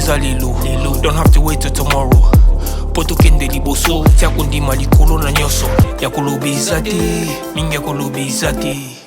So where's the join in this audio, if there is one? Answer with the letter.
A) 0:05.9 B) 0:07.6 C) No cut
A